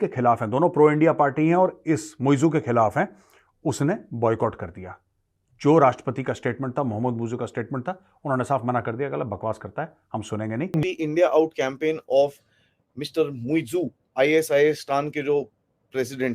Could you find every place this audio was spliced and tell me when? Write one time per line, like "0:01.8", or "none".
0:10.8